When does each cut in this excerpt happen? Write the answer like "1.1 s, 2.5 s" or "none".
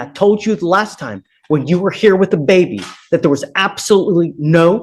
none